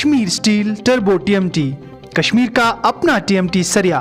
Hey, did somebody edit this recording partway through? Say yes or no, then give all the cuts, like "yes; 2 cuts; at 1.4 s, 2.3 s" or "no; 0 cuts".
no; 0 cuts